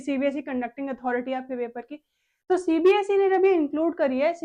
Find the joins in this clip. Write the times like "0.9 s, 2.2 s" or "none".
none